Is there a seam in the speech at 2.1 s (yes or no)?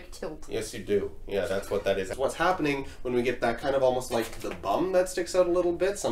yes